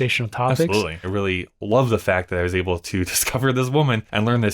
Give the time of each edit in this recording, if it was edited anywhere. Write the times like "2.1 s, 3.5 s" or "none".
1.0 s